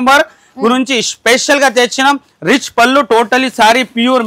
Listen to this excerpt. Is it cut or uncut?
uncut